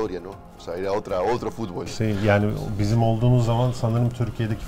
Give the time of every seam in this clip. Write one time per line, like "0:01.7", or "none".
none